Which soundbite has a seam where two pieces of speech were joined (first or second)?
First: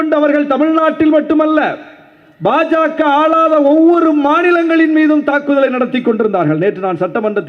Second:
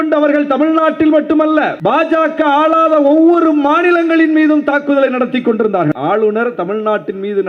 second